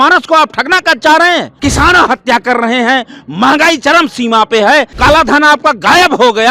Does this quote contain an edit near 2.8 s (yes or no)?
no